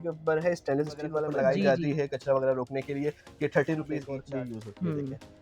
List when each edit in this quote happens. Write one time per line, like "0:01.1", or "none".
0:01.2
0:04.1